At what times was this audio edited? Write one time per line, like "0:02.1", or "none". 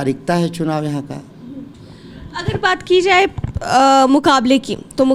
none